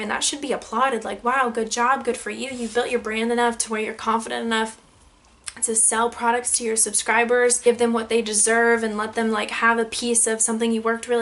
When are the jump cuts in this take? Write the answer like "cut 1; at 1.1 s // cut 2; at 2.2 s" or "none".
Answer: cut 1; at 7.6 s